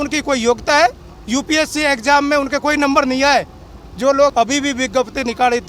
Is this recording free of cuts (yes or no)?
no